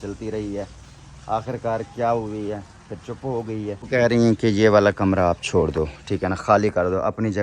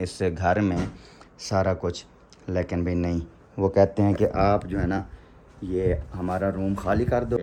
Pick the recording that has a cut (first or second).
first